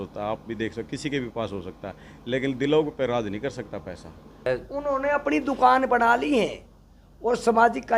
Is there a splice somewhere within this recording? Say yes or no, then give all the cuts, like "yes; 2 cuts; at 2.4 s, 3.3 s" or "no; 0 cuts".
yes; 1 cut; at 4.4 s